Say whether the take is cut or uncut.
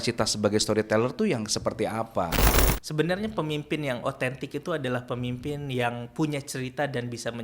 cut